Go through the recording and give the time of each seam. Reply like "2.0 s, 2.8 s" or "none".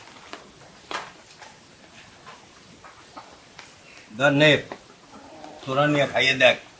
none